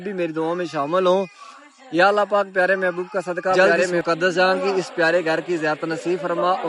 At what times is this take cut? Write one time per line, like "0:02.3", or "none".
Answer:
0:03.6